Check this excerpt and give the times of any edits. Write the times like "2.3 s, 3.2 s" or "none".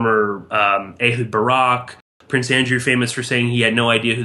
2.1 s